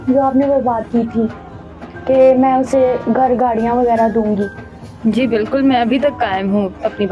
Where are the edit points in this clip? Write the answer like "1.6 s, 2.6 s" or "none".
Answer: none